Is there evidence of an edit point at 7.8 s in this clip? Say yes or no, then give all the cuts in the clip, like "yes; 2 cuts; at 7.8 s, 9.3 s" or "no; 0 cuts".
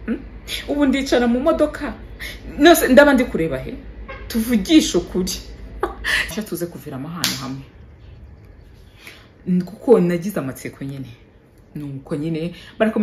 no; 1 cut; at 6.3 s